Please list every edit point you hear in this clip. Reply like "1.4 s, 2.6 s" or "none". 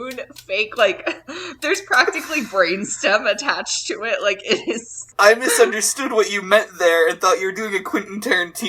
5.1 s